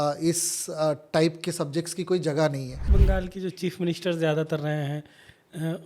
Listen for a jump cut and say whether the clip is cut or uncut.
cut